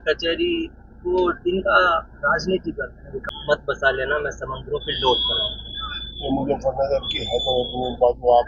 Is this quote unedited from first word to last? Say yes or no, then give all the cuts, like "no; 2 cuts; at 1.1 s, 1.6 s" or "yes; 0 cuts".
no; 1 cut; at 3.2 s